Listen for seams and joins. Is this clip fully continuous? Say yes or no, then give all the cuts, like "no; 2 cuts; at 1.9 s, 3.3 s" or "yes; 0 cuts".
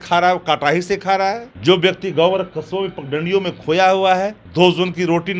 no; 2 cuts; at 1.5 s, 4.4 s